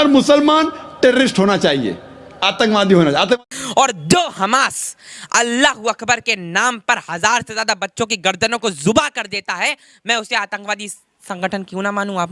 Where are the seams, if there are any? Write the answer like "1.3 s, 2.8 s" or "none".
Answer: 3.4 s

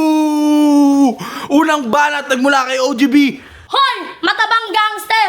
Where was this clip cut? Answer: 3.5 s

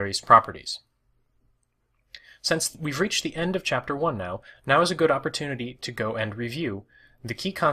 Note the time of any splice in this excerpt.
4.3 s

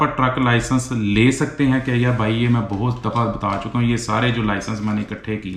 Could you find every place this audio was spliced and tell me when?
none

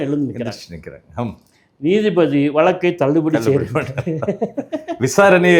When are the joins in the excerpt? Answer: none

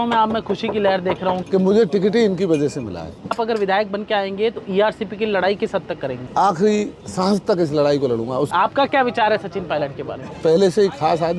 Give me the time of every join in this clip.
1.4 s, 3.4 s, 6.2 s, 8.5 s, 10.2 s

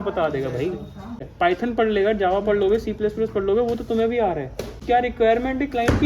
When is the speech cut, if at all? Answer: 1.3 s, 4.8 s

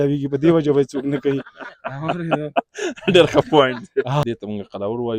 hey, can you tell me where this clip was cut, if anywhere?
4.2 s

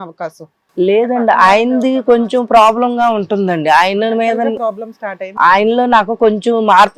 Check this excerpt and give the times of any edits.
none

